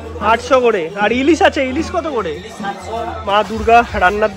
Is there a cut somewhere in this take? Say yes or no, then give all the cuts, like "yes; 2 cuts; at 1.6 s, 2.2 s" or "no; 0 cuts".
yes; 1 cut; at 3.2 s